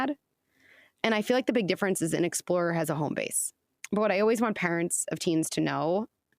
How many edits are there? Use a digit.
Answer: 2